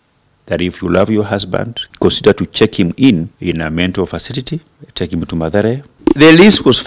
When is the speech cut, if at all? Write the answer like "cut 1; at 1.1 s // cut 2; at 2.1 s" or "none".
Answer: cut 1; at 1.9 s // cut 2; at 3.3 s // cut 3; at 4.8 s // cut 4; at 5.9 s